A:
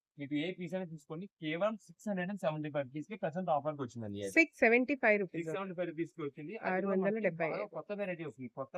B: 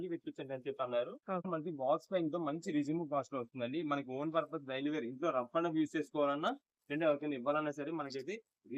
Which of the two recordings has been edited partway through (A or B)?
B